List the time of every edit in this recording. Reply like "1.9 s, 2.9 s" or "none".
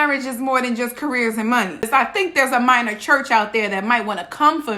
1.9 s